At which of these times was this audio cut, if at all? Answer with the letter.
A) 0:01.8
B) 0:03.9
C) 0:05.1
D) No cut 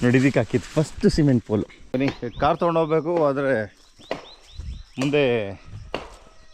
A